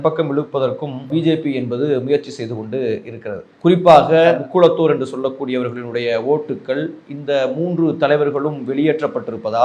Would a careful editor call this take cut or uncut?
cut